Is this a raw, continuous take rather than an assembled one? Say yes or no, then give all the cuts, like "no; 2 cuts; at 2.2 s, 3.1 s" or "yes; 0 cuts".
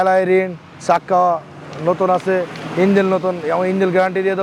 yes; 0 cuts